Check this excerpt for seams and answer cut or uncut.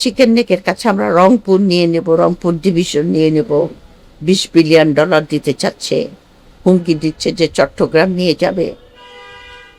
uncut